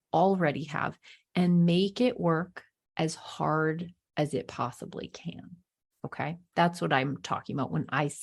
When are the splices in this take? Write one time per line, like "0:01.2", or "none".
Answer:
none